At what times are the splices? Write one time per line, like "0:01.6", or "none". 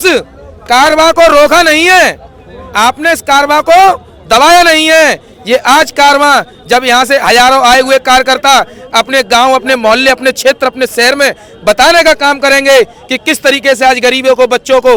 none